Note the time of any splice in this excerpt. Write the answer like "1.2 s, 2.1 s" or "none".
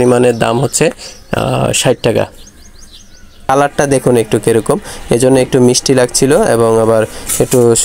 3.5 s